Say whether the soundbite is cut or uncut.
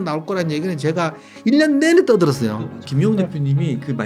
cut